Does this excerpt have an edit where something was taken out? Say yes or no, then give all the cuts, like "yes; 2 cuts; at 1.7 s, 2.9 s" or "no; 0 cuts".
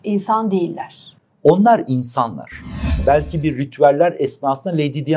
yes; 1 cut; at 3.0 s